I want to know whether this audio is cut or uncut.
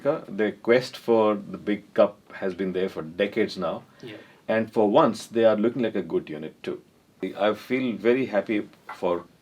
cut